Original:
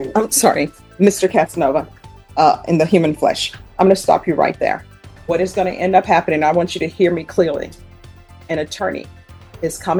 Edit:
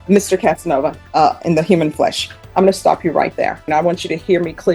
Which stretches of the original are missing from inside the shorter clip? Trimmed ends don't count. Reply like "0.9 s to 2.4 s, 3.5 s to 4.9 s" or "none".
1.9 s to 2.2 s, 4.9 s to 6.4 s